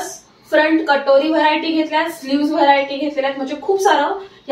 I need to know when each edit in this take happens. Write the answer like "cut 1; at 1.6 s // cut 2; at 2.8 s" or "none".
none